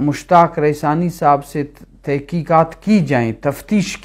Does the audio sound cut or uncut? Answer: uncut